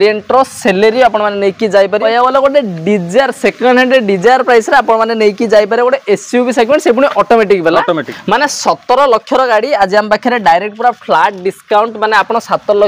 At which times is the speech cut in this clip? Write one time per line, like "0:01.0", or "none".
0:02.0
0:08.1